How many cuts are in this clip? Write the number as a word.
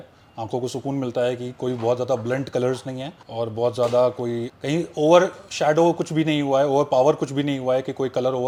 zero